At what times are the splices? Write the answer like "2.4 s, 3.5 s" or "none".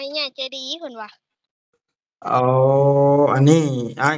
none